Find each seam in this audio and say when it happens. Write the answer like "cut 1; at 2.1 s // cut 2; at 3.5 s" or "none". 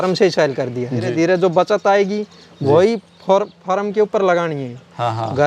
cut 1; at 1.1 s